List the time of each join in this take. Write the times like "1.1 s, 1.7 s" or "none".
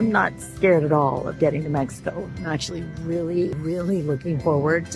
3.7 s